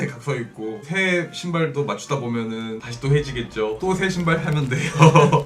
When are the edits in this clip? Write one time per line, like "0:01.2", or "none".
0:00.9
0:02.9

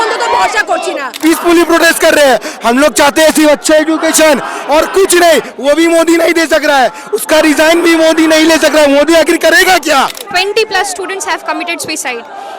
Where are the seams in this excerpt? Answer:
0:01.2
0:10.2

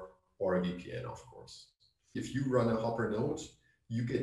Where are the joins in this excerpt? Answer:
none

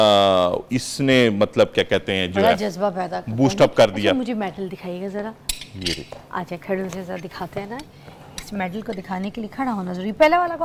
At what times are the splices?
none

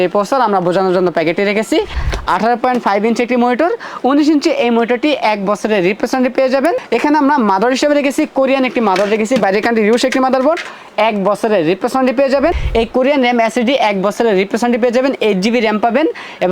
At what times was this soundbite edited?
0:02.0
0:06.8
0:12.6

